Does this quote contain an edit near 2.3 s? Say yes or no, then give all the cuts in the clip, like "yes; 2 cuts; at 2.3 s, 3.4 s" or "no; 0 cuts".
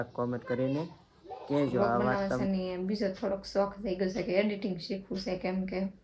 yes; 1 cut; at 2.3 s